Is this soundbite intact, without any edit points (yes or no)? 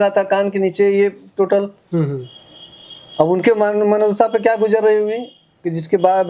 yes